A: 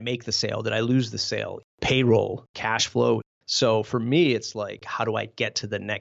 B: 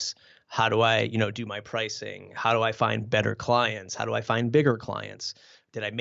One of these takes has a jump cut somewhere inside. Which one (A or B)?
A